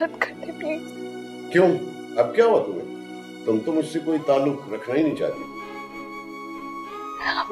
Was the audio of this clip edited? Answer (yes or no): no